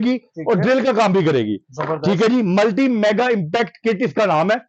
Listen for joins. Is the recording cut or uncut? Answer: uncut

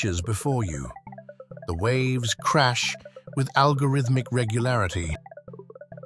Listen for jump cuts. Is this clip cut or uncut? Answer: uncut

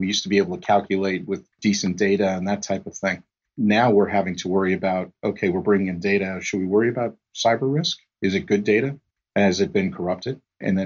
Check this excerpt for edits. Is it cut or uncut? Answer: cut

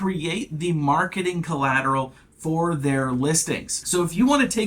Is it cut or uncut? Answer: cut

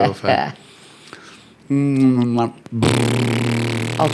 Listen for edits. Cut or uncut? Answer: uncut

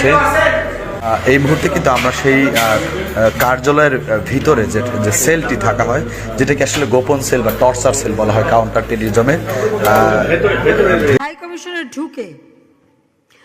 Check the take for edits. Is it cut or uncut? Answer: cut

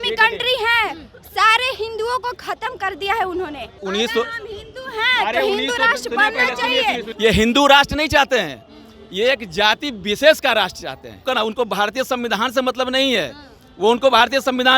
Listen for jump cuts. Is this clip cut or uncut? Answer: cut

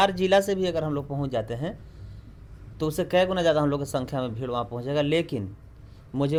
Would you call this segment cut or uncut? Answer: uncut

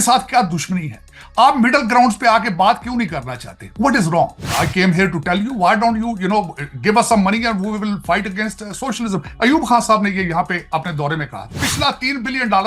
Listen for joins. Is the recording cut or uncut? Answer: cut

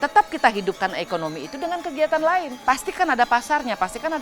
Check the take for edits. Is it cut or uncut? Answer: cut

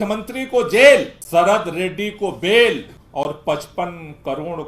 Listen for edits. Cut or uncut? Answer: cut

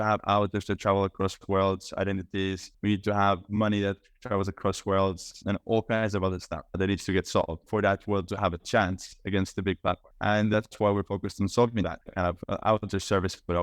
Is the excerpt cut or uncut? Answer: cut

